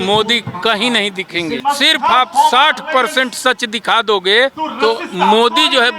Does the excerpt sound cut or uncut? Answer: cut